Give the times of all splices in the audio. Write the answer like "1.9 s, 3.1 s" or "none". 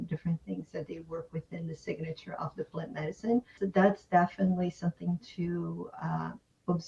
3.6 s